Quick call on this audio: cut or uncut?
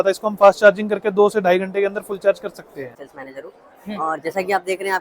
cut